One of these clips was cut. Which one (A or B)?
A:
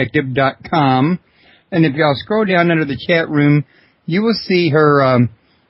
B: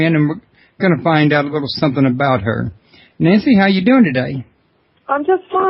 B